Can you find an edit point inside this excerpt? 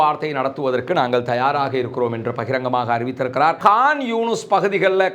yes; 1 cut; at 3.6 s

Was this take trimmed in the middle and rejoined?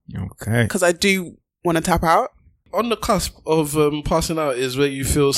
yes; 1 cut; at 2.5 s

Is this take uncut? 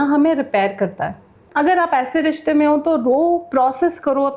yes; 0 cuts

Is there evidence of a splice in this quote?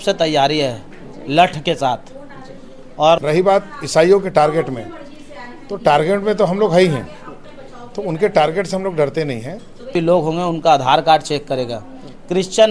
yes; 2 cuts; at 3.2 s, 9.9 s

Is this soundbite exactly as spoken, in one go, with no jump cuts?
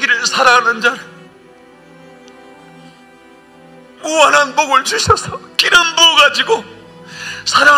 yes; 0 cuts

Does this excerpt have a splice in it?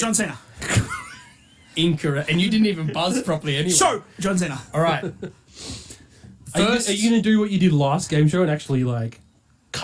no; 0 cuts

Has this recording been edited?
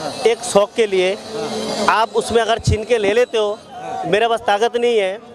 no; 0 cuts

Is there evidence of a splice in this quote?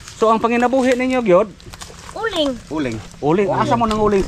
no; 0 cuts

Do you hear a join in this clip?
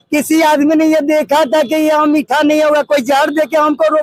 no; 0 cuts

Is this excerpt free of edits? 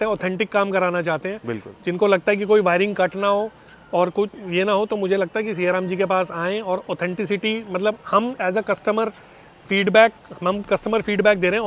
yes; 0 cuts

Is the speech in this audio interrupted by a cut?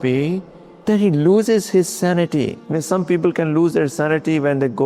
no; 0 cuts

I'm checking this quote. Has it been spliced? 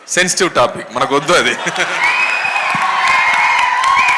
no; 0 cuts

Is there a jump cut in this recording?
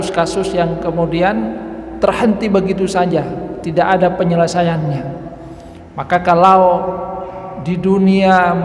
no; 0 cuts

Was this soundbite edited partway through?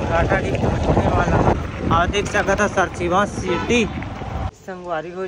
yes; 2 cuts; at 1.5 s, 4.5 s

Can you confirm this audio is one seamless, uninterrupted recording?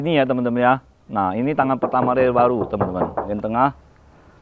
no; 1 cut; at 3.2 s

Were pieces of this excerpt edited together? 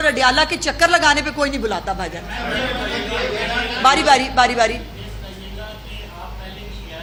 no; 0 cuts

